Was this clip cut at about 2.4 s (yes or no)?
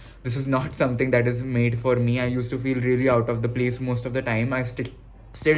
no